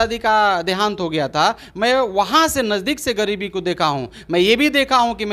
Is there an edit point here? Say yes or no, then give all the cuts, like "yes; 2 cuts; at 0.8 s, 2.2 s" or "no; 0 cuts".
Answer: no; 0 cuts